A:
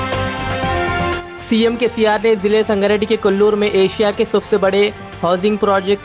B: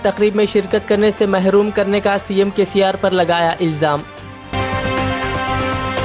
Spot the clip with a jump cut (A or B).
A